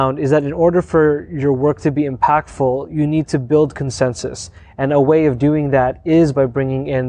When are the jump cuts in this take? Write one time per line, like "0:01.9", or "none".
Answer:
none